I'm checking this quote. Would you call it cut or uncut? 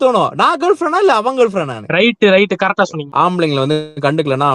cut